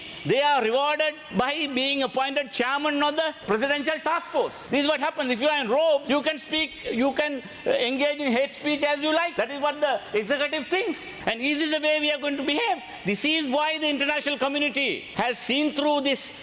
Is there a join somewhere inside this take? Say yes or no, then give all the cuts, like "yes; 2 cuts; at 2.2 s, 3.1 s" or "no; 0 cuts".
yes; 7 cuts; at 1.2 s, 3.4 s, 4.6 s, 6.0 s, 9.3 s, 11.1 s, 15.0 s